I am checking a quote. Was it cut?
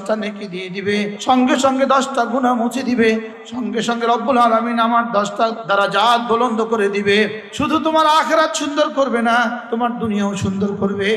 yes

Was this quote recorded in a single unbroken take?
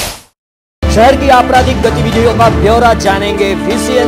no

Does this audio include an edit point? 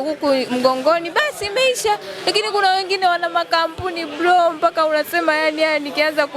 no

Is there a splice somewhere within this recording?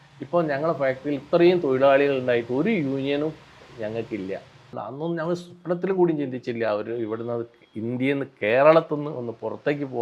yes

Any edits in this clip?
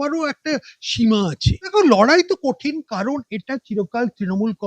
yes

